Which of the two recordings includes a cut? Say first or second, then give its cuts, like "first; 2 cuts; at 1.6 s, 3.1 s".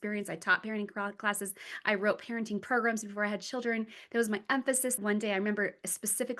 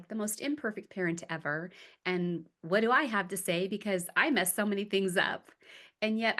first; 1 cut; at 5.0 s